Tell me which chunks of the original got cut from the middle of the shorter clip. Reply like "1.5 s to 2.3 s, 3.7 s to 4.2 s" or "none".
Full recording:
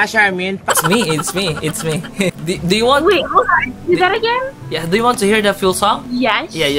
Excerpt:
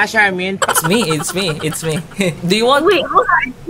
2.4 s to 2.6 s